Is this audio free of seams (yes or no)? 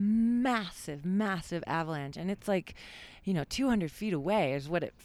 yes